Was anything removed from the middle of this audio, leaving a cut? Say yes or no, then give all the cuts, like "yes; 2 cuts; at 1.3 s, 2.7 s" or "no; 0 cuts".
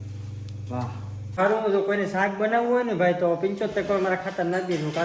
yes; 1 cut; at 1.4 s